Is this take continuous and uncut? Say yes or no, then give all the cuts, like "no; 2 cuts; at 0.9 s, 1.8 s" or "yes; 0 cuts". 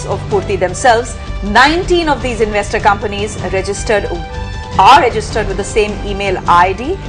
no; 1 cut; at 4.1 s